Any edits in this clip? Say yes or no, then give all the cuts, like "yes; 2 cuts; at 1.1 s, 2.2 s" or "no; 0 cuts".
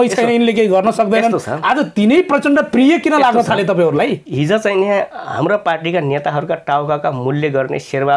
no; 0 cuts